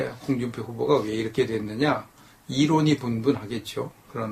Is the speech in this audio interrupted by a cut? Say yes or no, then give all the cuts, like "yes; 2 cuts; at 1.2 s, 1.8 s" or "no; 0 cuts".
no; 0 cuts